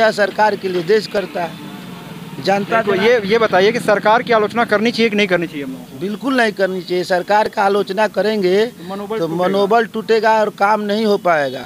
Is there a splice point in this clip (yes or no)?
no